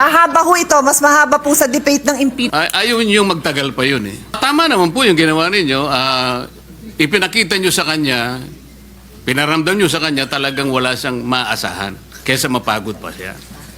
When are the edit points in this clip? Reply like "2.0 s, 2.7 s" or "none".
2.5 s, 4.4 s